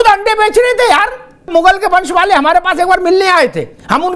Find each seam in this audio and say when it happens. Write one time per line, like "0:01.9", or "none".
0:01.5